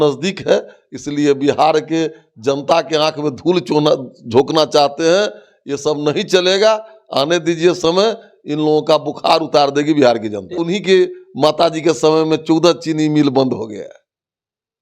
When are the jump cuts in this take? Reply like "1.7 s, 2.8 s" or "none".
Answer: 10.6 s

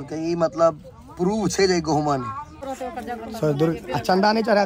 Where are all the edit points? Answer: 2.6 s

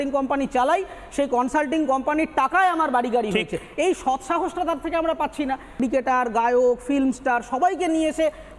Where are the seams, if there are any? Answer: 5.8 s

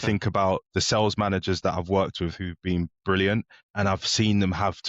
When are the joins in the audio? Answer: 3.6 s

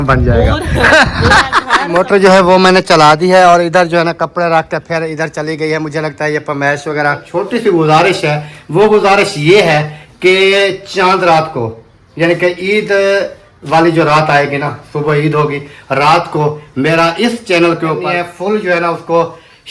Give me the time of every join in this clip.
1.9 s, 7.2 s, 18.0 s

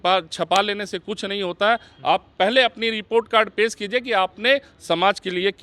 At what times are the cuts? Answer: none

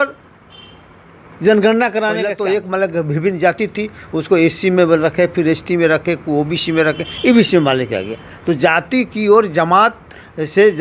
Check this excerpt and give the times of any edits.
2.3 s

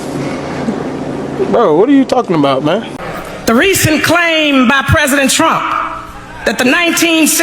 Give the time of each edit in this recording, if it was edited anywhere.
2.9 s

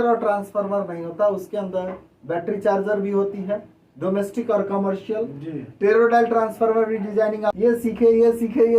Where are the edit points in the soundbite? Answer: 7.5 s

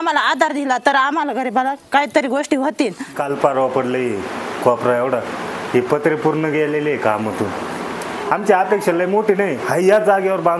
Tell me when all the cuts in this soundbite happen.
3.0 s, 8.2 s

